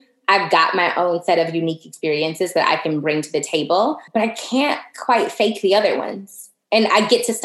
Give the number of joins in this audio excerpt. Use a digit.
1